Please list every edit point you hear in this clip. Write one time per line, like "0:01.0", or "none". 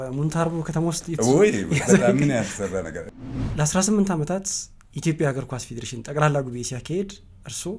0:03.5